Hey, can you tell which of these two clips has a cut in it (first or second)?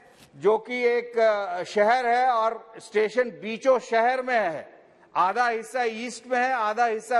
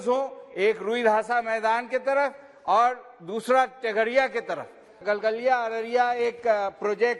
second